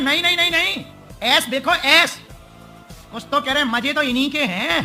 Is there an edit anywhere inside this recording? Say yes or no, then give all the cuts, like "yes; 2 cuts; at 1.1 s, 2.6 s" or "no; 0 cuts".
no; 0 cuts